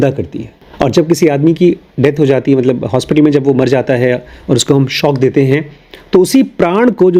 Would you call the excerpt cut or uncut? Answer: uncut